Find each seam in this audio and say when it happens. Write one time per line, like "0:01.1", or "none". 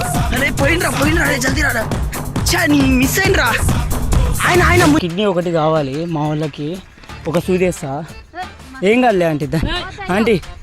0:05.0
0:06.9